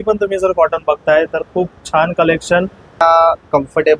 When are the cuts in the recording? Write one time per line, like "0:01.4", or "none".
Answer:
0:03.0